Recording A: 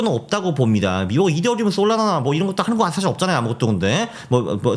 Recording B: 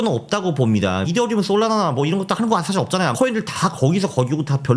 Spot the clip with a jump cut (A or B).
B